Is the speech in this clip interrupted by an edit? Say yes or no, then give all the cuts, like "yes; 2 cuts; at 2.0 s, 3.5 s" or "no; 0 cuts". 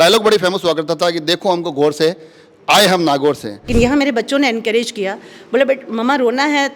yes; 1 cut; at 3.7 s